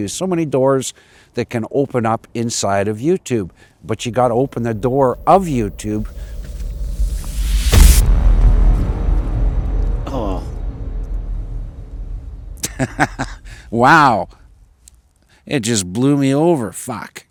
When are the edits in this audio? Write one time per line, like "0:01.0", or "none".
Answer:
none